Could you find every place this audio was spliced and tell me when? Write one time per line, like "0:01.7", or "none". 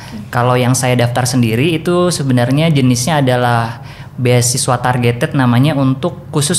none